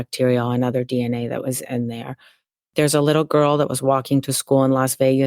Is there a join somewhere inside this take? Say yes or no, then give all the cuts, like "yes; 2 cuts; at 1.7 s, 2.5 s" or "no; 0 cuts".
yes; 1 cut; at 2.6 s